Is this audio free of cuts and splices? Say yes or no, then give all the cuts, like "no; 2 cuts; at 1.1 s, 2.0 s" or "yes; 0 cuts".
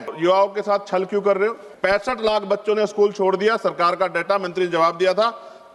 no; 1 cut; at 1.7 s